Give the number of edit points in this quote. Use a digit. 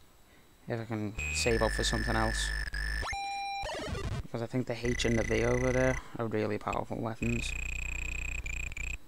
1